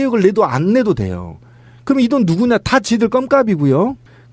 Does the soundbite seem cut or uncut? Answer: uncut